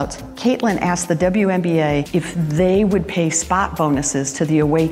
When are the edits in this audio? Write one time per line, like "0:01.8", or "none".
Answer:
none